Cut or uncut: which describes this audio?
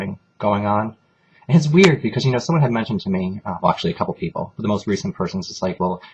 uncut